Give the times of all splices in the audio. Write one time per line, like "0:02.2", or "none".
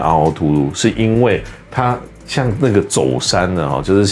none